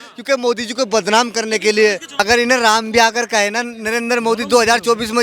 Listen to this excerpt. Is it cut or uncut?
cut